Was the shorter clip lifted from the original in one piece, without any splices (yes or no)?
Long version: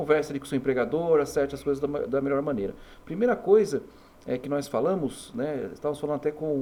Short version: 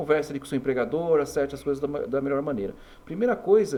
yes